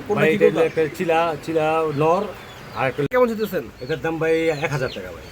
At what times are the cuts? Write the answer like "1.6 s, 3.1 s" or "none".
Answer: 3.1 s